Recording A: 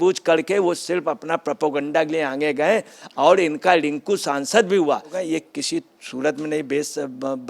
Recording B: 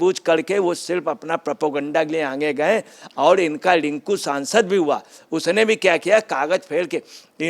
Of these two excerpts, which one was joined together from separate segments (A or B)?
A